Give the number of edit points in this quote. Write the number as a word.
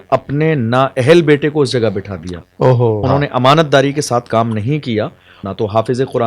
two